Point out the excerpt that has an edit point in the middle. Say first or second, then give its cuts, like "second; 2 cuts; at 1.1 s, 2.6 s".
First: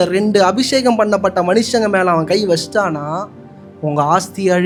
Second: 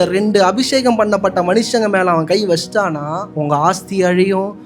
second; 1 cut; at 3.2 s